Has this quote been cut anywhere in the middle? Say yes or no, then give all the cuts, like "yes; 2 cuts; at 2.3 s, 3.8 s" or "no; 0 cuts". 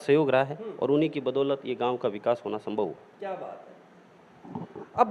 no; 0 cuts